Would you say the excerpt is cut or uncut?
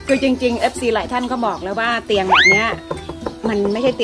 uncut